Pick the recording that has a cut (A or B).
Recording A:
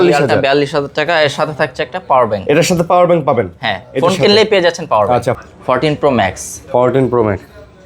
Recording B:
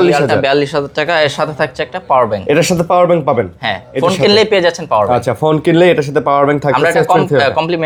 A